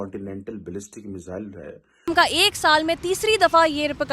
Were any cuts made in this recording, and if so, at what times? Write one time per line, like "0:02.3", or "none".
0:02.1